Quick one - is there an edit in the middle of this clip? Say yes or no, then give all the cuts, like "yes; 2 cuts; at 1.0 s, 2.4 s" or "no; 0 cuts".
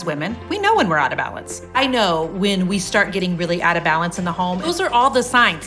yes; 2 cuts; at 1.8 s, 4.7 s